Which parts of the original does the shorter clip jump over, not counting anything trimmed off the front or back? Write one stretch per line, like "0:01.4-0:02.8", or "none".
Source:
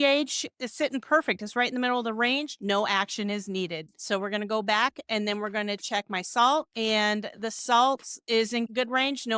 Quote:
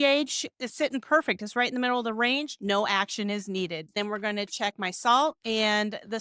0:04.0-0:05.3